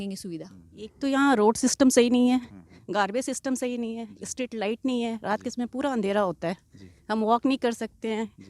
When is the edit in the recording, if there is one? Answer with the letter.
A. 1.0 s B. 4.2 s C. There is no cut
A